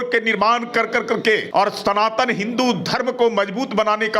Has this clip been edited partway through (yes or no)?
yes